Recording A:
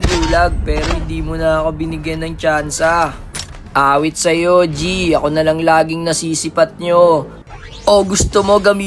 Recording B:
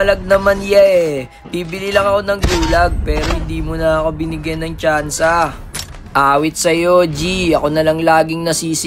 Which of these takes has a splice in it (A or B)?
A